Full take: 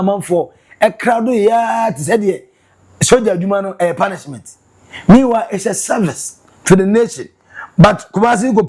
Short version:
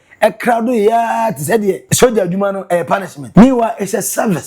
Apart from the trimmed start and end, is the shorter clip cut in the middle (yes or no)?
yes